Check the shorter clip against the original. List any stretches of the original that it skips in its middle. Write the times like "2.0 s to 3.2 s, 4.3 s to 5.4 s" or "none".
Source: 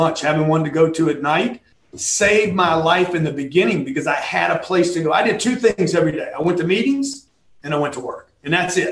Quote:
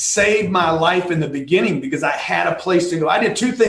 none